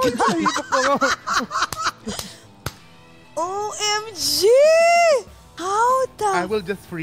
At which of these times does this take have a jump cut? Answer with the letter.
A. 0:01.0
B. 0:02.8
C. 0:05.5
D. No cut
C